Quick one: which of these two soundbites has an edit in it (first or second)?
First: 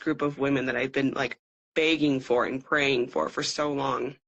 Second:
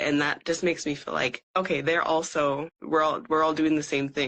second